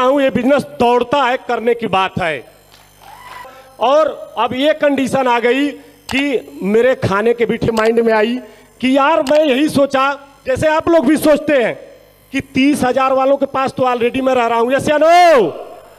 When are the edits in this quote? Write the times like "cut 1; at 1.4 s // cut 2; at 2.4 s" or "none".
cut 1; at 3.6 s // cut 2; at 7.7 s